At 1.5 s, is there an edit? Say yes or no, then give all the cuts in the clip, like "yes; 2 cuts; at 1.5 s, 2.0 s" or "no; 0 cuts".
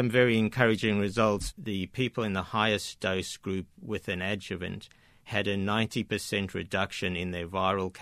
yes; 1 cut; at 1.5 s